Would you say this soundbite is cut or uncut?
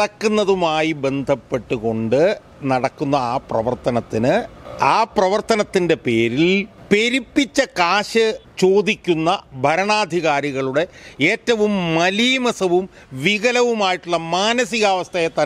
cut